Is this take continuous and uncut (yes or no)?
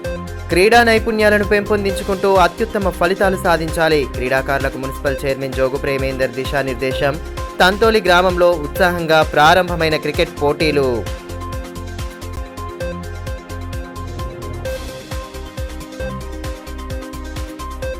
yes